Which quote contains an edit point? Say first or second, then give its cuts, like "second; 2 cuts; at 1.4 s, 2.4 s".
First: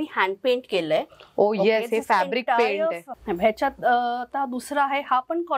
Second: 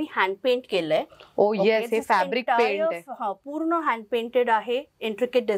first; 1 cut; at 3.1 s